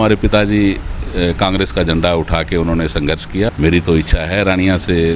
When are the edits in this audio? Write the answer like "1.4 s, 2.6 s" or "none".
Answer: 3.5 s